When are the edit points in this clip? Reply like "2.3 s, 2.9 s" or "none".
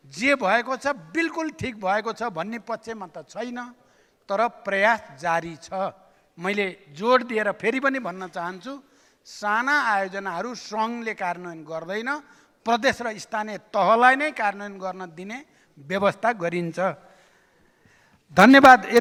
none